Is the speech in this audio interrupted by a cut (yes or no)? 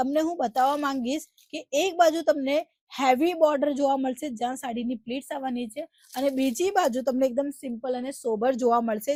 no